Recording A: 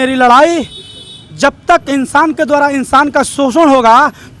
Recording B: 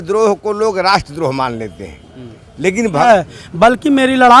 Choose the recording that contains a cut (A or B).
B